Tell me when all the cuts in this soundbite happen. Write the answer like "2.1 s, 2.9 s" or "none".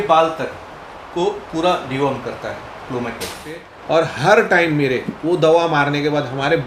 3.7 s